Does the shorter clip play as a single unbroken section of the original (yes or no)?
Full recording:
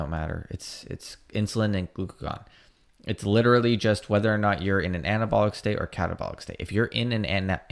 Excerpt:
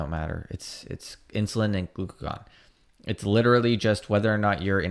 yes